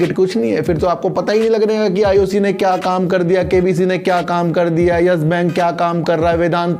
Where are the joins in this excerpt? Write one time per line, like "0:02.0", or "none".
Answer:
none

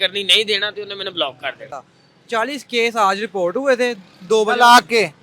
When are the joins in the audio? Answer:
0:01.7

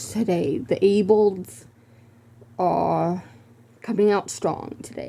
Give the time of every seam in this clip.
none

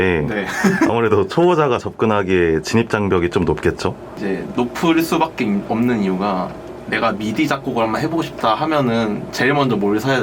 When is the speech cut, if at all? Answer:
none

